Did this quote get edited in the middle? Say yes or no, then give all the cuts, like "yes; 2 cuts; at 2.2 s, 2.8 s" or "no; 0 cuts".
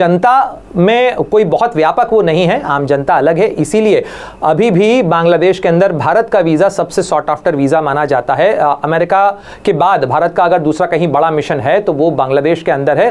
no; 0 cuts